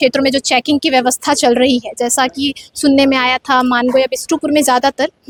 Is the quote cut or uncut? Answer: uncut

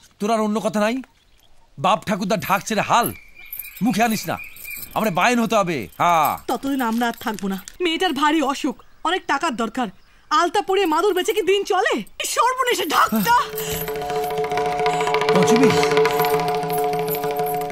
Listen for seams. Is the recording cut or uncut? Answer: cut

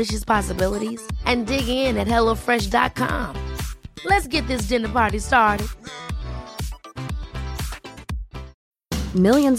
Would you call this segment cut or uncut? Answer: cut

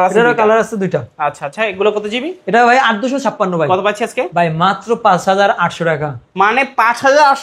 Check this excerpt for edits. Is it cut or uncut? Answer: uncut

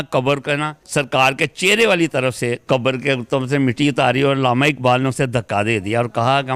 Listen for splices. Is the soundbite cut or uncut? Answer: uncut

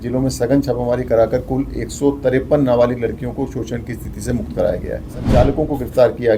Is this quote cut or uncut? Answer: cut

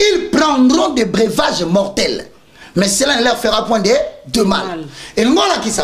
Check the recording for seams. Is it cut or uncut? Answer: uncut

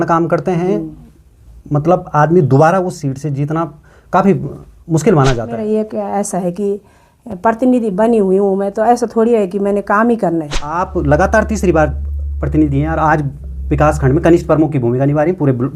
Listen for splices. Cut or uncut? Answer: cut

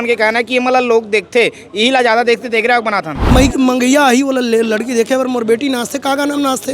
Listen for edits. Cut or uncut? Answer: cut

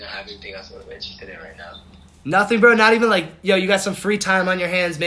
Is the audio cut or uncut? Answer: uncut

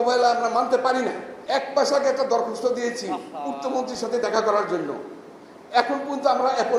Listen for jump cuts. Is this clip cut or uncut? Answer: cut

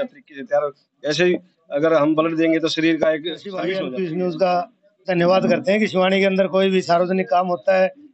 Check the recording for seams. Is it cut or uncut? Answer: cut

